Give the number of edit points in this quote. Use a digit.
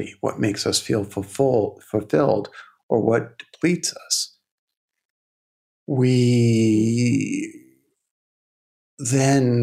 0